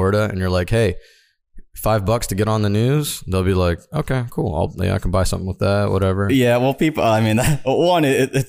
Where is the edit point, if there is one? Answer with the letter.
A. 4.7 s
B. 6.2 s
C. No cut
B